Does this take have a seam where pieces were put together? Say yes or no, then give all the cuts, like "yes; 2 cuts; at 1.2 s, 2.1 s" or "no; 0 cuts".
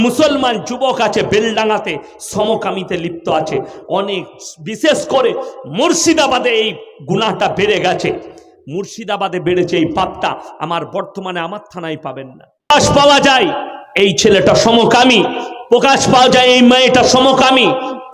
yes; 1 cut; at 12.7 s